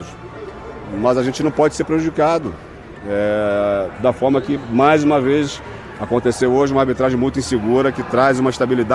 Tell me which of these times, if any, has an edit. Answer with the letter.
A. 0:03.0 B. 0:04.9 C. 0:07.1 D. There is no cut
D